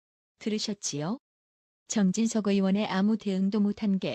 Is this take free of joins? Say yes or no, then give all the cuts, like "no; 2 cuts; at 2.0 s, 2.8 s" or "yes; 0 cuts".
no; 1 cut; at 2.4 s